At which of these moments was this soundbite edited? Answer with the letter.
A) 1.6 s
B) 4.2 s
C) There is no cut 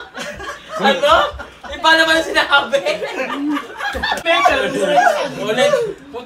B